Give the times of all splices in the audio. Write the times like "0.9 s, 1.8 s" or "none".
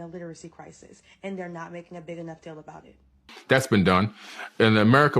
3.3 s